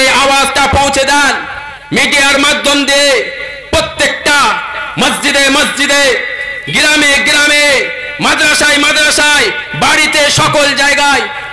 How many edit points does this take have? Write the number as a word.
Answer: zero